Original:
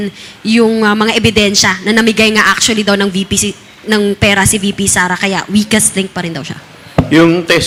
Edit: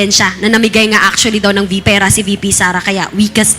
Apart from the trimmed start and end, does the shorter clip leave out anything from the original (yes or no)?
yes